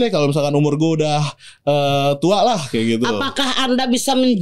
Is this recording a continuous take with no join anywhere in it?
yes; 0 cuts

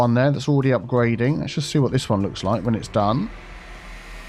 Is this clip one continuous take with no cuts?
yes; 0 cuts

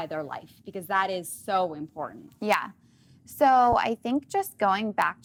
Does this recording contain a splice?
no; 0 cuts

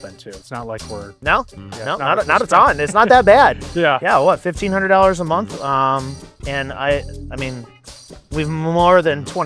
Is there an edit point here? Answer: no; 0 cuts

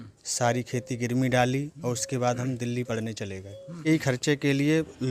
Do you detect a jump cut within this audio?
yes; 1 cut; at 3.8 s

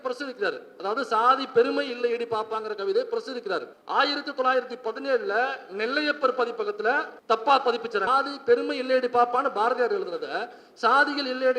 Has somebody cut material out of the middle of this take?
yes; 3 cuts; at 3.8 s, 7.1 s, 8.1 s

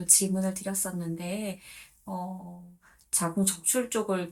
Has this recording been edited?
no; 0 cuts

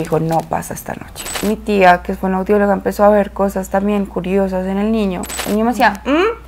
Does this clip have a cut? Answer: yes; 2 cuts; at 1.3 s, 5.3 s

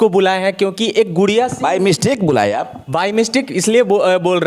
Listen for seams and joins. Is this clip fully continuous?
yes; 0 cuts

